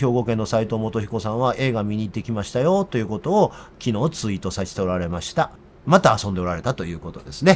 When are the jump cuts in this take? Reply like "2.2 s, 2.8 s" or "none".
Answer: 5.7 s